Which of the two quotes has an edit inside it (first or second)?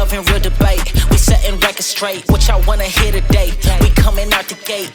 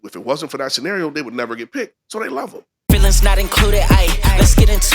second